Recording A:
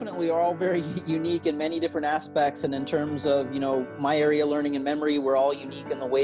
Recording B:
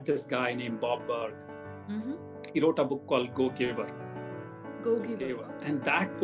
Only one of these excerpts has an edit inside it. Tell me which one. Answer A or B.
B